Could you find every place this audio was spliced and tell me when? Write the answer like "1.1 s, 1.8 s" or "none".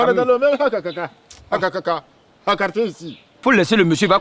none